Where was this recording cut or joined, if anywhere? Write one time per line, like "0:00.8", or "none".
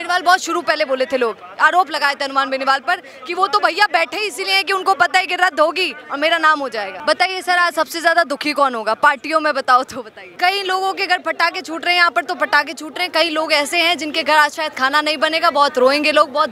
0:07.0
0:10.3